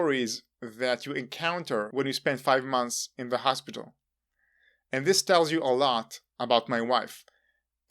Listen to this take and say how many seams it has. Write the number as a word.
one